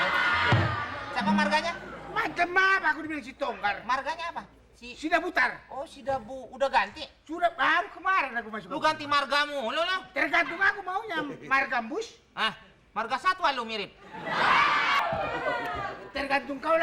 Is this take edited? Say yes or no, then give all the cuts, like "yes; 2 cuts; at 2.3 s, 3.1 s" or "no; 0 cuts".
yes; 1 cut; at 14.8 s